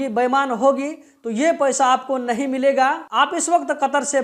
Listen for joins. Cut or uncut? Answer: uncut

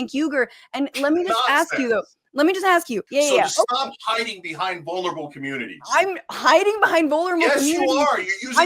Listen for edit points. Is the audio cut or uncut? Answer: cut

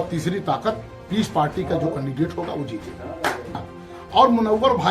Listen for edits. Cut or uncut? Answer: cut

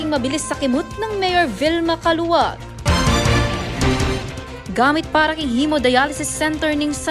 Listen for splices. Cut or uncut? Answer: uncut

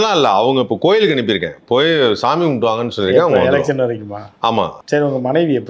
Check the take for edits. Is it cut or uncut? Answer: cut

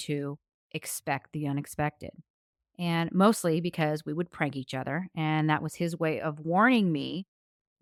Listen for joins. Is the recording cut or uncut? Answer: uncut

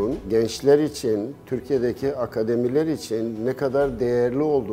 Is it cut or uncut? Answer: uncut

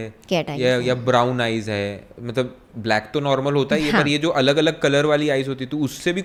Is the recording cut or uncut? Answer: uncut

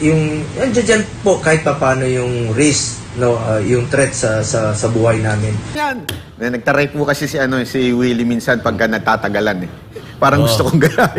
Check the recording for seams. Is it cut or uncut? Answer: cut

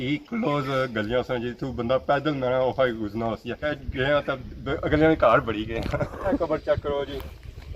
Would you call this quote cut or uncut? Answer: cut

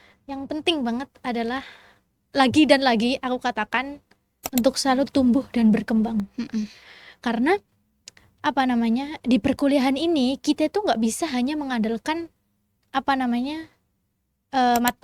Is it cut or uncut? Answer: uncut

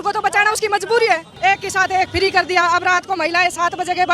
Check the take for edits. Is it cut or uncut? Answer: cut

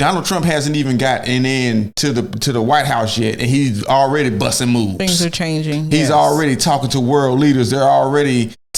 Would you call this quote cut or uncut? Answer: uncut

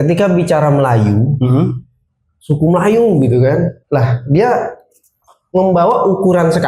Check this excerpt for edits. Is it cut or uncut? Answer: cut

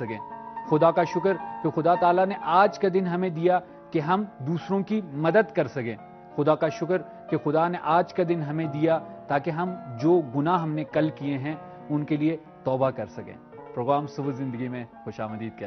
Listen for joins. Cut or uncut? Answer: uncut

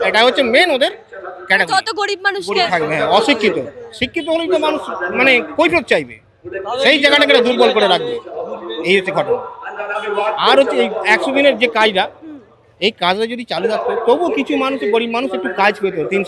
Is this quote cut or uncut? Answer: uncut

